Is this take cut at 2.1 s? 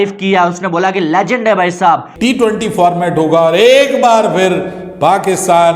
yes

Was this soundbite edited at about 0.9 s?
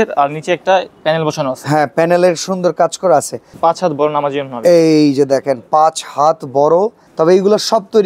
no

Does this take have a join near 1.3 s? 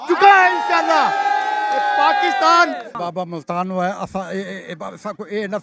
no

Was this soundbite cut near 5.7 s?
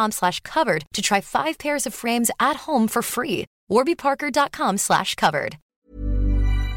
yes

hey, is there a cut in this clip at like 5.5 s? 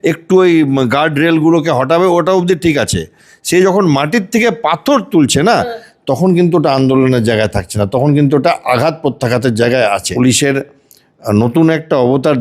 no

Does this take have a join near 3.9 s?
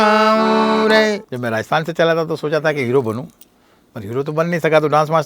no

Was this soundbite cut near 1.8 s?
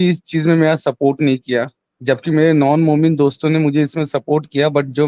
yes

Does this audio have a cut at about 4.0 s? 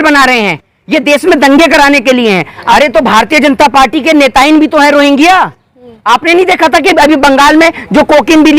no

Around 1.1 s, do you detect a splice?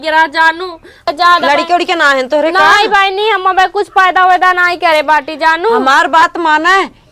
yes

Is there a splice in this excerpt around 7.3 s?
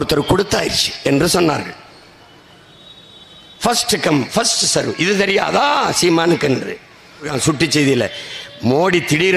yes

